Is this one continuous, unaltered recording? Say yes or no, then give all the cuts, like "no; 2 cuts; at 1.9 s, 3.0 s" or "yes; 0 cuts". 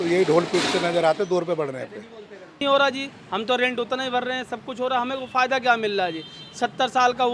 no; 1 cut; at 2.6 s